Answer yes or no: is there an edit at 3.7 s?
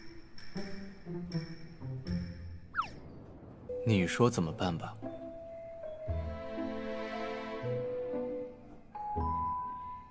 yes